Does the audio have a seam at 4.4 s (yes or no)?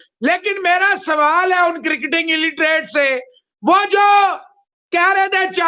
no